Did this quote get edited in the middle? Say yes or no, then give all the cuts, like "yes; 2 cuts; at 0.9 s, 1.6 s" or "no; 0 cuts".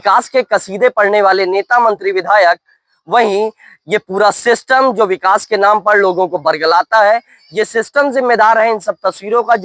no; 0 cuts